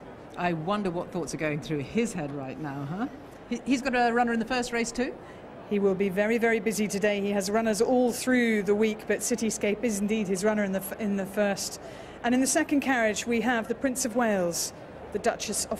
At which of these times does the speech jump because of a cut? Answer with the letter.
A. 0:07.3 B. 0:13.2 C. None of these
C